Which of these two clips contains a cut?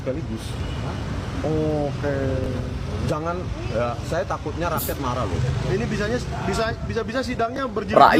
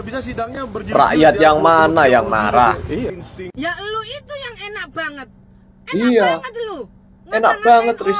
second; 1 cut; at 3.1 s

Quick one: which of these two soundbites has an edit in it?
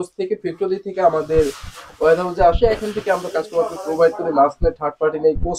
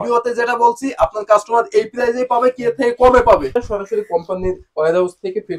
second; 1 cut; at 3.6 s

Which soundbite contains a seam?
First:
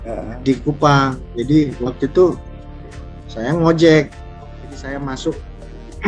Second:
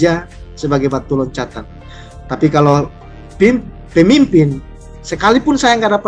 first; 1 cut; at 4.2 s

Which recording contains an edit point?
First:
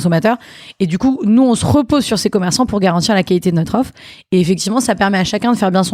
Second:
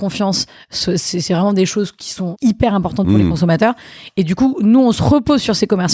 second; 1 cut; at 2.3 s

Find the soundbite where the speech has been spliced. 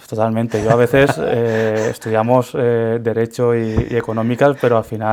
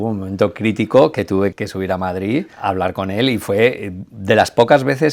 second; 2 cuts; at 1.5 s, 2.5 s

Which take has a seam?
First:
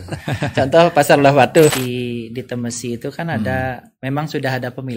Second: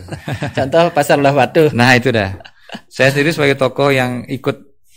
first; 1 cut; at 1.7 s

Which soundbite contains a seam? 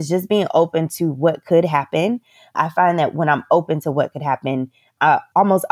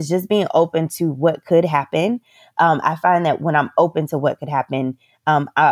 first; 2 cuts; at 2.5 s, 5.0 s

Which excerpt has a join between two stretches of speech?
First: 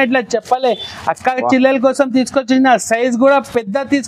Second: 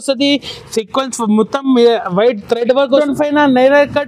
second; 1 cut; at 3.0 s

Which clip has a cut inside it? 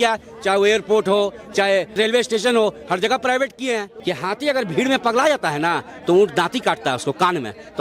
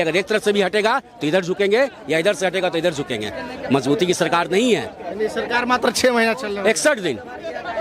first; 2 cuts; at 2.0 s, 3.9 s

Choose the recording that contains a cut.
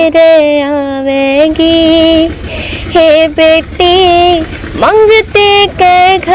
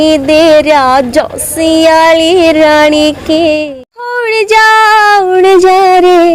second; 1 cut; at 3.6 s

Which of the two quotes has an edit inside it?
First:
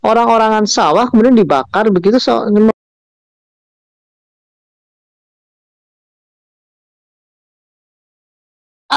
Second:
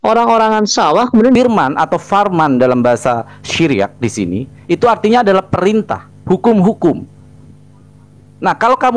second; 1 cut; at 1.4 s

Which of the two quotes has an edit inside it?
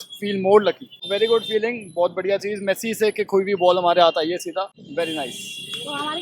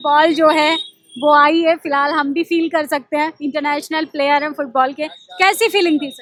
first; 2 cuts; at 1.0 s, 4.8 s

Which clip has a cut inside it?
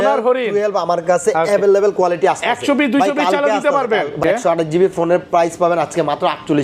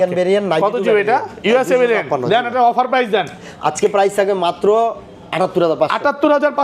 first; 1 cut; at 4.2 s

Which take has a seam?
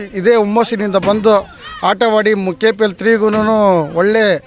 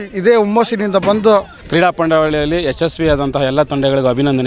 second; 1 cut; at 1.7 s

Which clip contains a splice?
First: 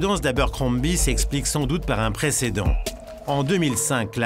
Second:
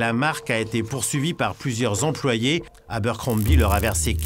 second; 1 cut; at 2.8 s

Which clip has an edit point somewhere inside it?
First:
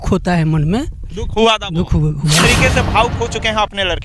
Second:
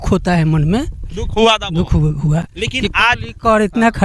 first; 1 cut; at 2.5 s

